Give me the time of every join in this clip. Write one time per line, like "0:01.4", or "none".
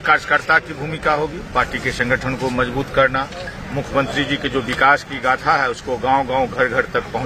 none

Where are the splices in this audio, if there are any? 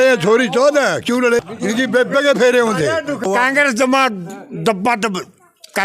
0:01.4
0:03.5

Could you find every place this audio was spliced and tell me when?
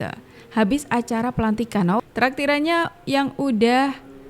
0:02.0

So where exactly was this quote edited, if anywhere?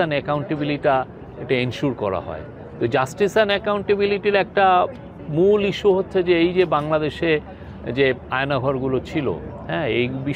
none

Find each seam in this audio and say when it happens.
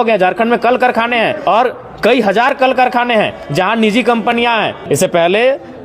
0:01.4
0:04.8

